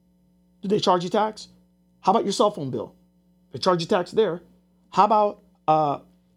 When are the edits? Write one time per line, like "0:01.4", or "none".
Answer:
none